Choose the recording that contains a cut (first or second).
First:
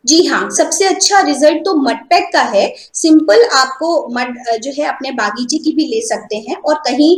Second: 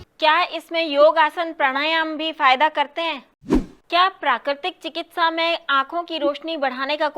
second